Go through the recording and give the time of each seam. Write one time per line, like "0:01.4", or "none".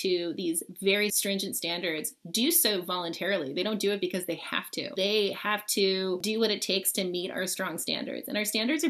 0:01.2
0:04.9
0:06.2